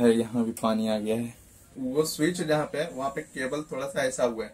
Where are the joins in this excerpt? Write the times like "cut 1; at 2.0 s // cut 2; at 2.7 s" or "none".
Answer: cut 1; at 1.7 s